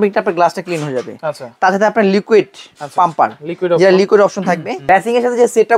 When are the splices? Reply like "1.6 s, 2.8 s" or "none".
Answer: 4.7 s